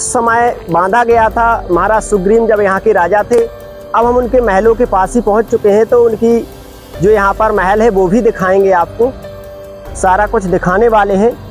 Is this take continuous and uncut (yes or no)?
yes